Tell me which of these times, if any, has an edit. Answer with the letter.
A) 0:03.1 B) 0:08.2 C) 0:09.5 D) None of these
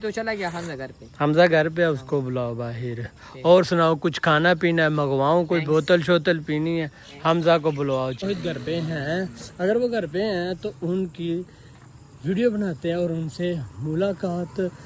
B